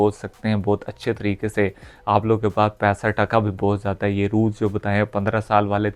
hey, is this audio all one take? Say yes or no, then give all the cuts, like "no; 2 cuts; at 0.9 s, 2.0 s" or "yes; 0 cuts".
yes; 0 cuts